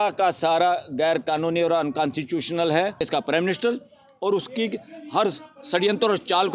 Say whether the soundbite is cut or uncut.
cut